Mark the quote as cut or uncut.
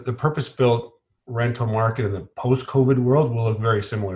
uncut